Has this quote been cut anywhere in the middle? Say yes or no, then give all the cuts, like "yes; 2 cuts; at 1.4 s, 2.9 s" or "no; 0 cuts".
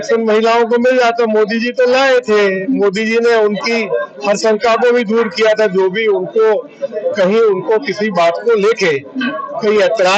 no; 0 cuts